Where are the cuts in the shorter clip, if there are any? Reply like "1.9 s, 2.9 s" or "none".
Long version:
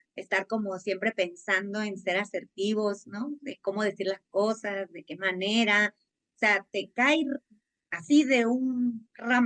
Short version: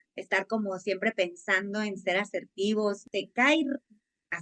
3.1 s